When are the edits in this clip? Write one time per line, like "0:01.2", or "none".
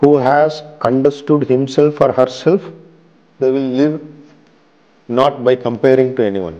0:03.4